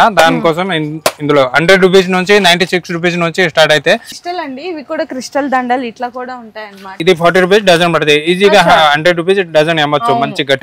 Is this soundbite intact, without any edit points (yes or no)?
no